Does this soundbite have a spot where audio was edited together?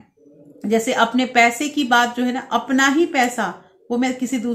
no; 0 cuts

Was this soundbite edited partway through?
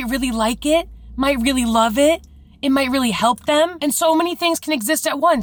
no; 0 cuts

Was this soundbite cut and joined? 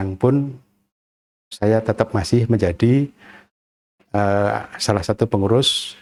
no; 0 cuts

